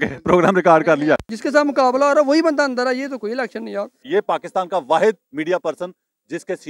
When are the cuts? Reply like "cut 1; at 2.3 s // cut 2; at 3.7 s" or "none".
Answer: cut 1; at 1.3 s // cut 2; at 4.0 s